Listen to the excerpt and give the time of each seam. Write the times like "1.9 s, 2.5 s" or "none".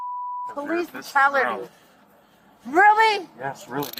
none